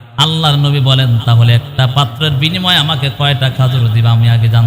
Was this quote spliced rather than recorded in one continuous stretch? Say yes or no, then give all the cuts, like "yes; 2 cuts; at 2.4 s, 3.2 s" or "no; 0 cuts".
no; 0 cuts